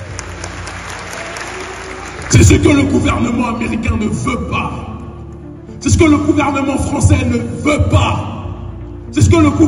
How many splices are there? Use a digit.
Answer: 1